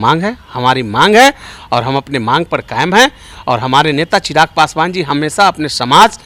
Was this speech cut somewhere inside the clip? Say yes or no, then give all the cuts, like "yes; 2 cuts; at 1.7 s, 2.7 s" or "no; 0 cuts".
no; 0 cuts